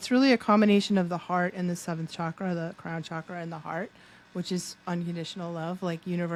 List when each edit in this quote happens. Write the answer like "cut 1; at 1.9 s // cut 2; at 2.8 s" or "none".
none

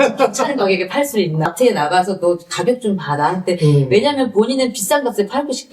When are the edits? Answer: cut 1; at 1.5 s

